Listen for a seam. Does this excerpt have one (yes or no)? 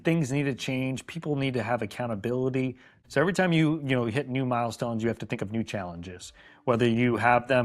yes